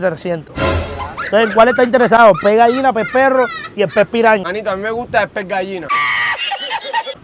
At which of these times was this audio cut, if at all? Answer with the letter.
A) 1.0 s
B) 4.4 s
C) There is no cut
B